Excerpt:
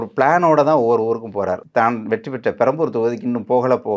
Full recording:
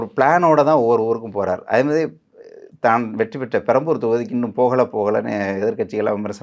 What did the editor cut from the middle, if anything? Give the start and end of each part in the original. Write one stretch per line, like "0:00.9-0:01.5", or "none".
0:01.6-0:02.7